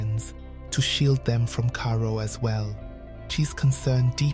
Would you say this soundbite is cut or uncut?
cut